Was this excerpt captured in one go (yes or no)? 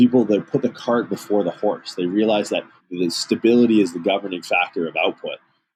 yes